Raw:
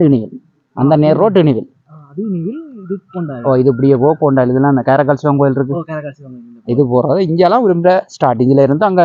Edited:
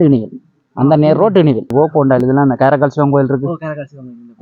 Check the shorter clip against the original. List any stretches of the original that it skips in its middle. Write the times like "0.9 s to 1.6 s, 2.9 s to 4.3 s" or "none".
1.7 s to 4.0 s